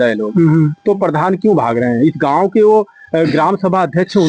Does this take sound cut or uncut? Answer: uncut